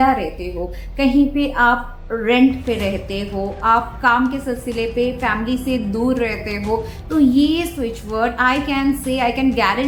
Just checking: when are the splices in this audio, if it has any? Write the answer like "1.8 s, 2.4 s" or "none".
none